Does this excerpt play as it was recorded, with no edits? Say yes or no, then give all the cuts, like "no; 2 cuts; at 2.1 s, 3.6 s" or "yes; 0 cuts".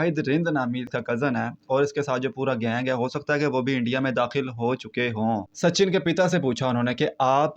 no; 2 cuts; at 0.9 s, 5.3 s